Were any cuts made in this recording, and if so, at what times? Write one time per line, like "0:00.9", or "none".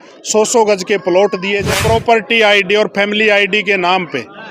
0:01.8